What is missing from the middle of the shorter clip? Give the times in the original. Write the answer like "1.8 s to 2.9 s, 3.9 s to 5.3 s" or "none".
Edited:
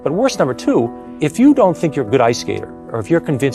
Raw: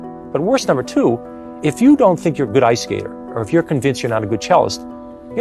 1.3 s to 1.5 s